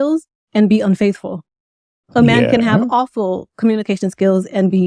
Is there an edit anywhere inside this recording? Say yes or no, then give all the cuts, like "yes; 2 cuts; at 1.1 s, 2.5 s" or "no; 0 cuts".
no; 0 cuts